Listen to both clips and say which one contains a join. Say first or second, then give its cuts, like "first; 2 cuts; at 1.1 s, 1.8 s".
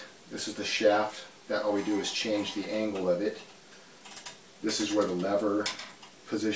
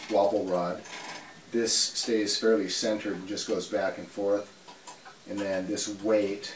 second; 1 cut; at 1.4 s